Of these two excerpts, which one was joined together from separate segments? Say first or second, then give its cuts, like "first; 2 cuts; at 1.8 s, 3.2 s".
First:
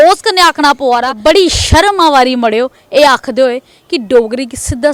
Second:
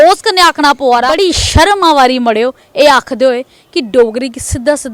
second; 1 cut; at 1.1 s